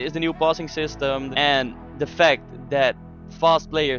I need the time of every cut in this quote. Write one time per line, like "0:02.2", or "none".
0:01.3